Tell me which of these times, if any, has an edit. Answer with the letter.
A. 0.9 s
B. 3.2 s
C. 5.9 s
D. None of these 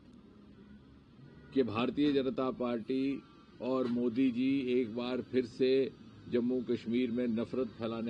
D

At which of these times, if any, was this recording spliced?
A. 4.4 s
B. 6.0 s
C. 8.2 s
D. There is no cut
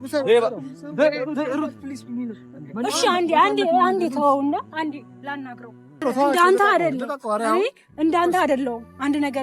B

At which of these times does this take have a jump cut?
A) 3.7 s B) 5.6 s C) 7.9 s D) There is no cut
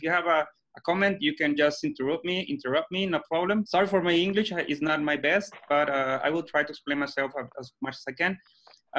A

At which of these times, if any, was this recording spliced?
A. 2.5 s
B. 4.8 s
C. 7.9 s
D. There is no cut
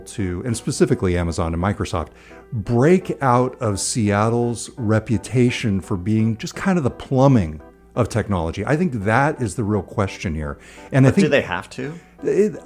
D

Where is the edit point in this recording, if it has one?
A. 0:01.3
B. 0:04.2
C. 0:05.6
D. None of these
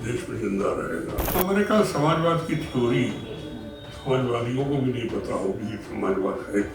A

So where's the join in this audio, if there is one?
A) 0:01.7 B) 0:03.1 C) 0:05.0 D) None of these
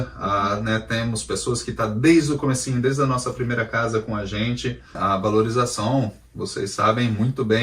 C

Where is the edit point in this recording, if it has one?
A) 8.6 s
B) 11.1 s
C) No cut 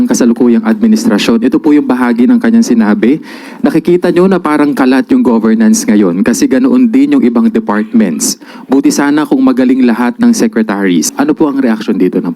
B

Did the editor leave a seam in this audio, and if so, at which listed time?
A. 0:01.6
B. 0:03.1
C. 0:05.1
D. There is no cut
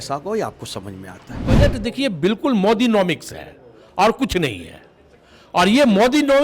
A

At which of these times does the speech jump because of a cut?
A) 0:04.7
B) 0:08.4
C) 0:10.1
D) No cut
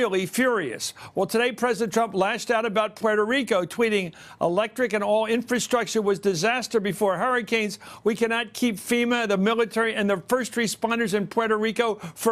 B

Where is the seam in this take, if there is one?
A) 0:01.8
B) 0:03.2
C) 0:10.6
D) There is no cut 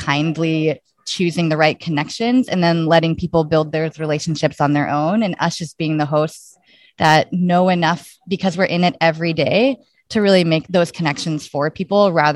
C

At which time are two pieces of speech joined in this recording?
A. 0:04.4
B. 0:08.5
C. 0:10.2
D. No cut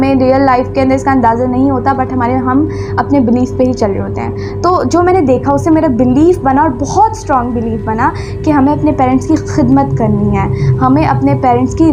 D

